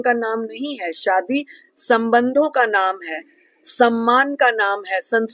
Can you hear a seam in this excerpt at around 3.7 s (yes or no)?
no